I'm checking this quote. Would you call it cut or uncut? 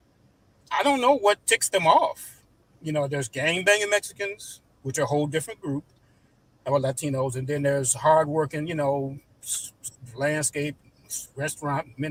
uncut